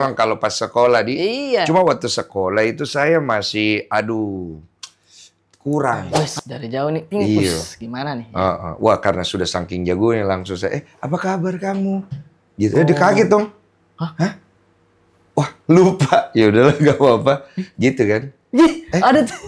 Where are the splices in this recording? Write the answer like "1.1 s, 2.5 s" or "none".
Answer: 6.1 s